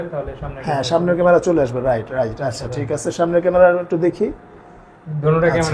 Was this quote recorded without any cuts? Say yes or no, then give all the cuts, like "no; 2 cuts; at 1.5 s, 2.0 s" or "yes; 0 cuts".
yes; 0 cuts